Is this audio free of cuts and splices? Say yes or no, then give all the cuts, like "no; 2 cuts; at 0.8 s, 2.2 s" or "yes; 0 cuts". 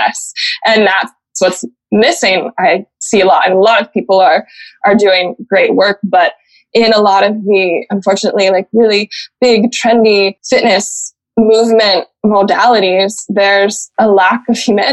no; 2 cuts; at 10.4 s, 13.8 s